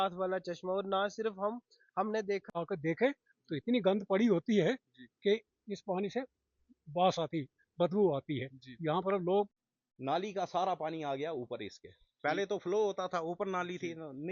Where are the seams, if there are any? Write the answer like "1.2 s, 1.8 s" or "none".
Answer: 2.5 s, 9.5 s